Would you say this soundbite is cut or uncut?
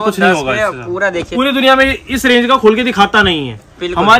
cut